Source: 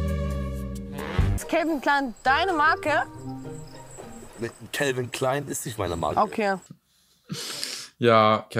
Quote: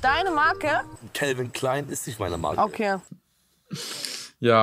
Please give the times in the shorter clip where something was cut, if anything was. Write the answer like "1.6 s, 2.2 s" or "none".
1.0 s